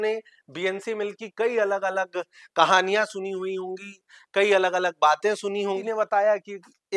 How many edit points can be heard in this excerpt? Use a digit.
1